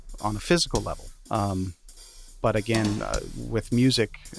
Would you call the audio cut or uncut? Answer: cut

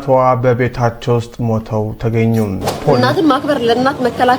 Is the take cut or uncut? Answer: cut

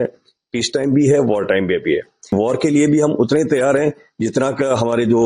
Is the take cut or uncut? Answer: cut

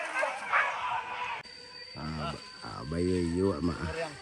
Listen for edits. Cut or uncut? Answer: cut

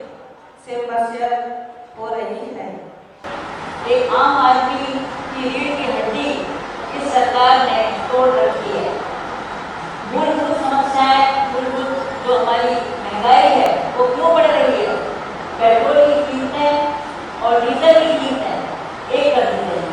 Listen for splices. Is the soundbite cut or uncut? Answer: uncut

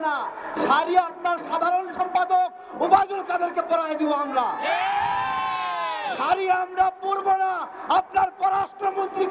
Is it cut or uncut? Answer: uncut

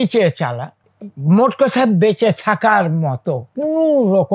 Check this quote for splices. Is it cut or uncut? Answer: uncut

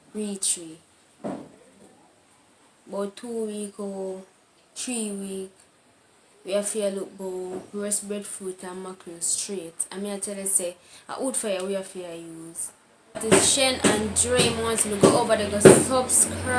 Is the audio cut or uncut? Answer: cut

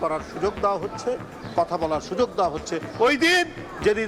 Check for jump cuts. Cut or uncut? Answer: uncut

